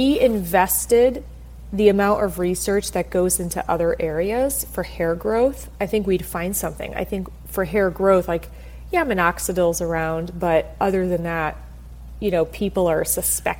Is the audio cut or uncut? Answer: uncut